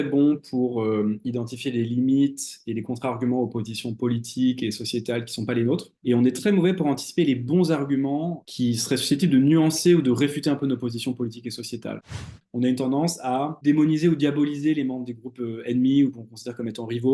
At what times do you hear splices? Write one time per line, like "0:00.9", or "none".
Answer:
0:05.9
0:12.2
0:13.6